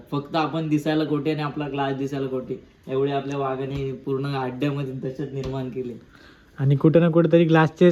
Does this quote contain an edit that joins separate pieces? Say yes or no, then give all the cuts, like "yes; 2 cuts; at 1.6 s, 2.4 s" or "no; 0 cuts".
no; 0 cuts